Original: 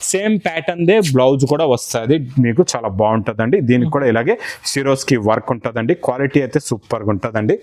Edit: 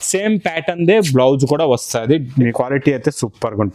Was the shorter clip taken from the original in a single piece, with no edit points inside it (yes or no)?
no